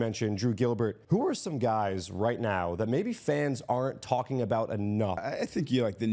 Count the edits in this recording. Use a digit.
2